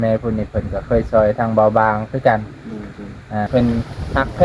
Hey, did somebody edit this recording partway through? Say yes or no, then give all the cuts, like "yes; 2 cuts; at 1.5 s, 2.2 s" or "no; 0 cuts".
yes; 1 cut; at 3.5 s